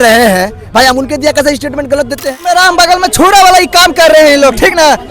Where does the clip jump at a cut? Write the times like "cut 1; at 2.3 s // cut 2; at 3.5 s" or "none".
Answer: cut 1; at 2.3 s